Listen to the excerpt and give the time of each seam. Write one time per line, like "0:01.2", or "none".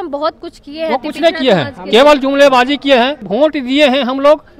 0:03.2